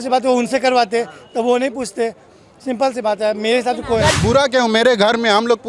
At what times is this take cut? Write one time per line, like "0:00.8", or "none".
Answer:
0:04.1